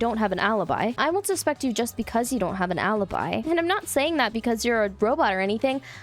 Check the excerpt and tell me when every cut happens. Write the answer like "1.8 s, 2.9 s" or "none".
1.0 s, 3.4 s